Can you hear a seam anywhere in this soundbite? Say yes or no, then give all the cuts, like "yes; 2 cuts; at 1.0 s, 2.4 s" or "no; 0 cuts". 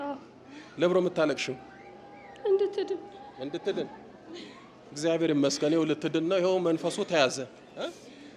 no; 0 cuts